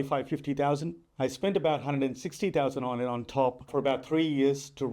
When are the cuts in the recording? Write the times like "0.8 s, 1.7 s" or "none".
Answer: 3.7 s